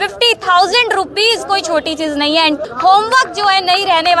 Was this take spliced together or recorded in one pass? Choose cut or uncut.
cut